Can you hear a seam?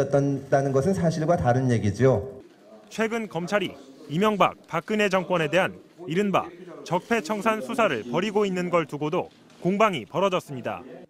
no; 0 cuts

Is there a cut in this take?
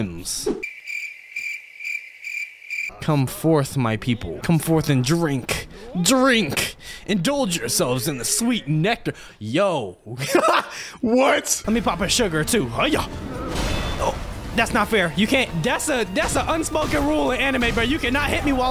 yes; 2 cuts; at 11.5 s, 15.5 s

